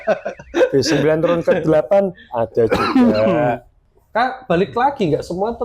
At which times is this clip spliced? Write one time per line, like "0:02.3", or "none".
0:03.7